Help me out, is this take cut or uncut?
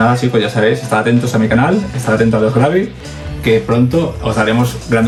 uncut